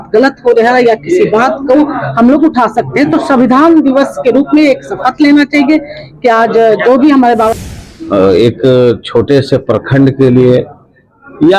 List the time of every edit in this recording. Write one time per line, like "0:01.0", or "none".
0:07.6